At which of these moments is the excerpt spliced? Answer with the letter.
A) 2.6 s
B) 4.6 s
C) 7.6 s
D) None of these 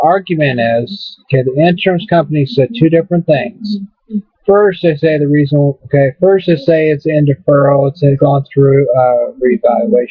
A